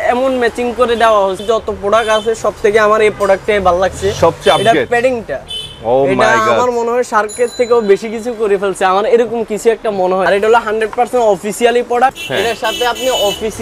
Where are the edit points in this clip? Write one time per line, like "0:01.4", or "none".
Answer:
0:01.4
0:10.2
0:12.2